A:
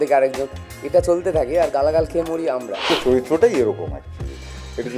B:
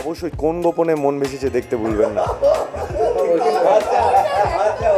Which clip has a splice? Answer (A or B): A